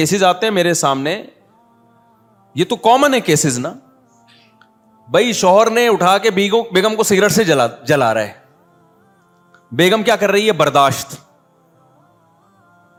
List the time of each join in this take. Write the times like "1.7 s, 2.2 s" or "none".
none